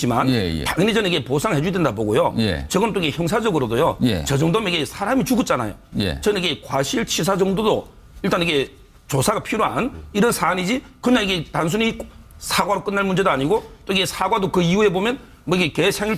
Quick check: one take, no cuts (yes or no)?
no